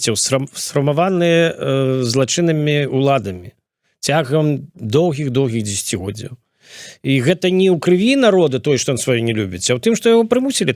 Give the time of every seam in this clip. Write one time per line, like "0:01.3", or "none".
none